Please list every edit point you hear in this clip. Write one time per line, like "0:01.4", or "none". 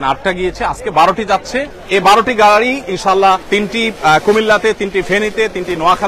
0:01.7
0:03.4